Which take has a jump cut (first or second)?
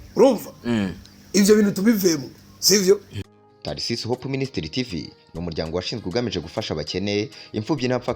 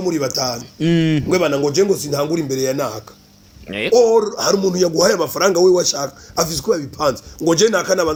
first